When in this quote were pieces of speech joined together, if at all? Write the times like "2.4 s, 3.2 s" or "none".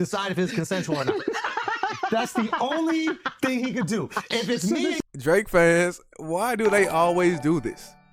5.0 s